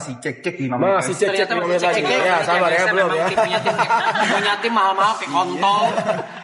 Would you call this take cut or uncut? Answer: uncut